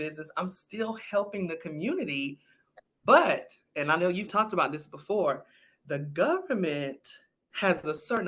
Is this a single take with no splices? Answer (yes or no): yes